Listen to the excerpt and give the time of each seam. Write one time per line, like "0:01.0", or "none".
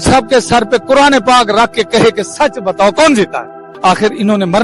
0:03.7